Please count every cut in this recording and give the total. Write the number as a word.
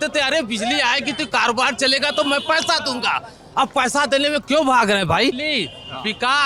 one